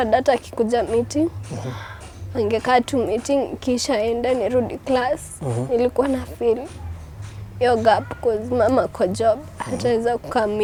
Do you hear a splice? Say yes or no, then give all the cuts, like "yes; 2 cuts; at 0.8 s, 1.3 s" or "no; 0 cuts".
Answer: no; 0 cuts